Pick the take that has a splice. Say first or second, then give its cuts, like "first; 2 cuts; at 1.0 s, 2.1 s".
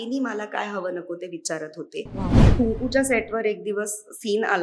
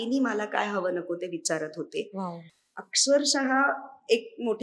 first; 1 cut; at 2.4 s